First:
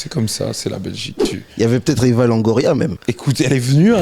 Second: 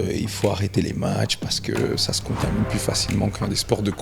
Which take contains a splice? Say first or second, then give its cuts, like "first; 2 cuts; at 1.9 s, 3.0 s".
first; 2 cuts; at 1.2 s, 3.0 s